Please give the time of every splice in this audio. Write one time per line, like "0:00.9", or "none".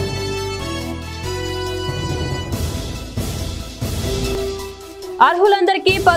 0:05.1